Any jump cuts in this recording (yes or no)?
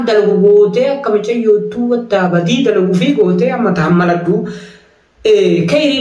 no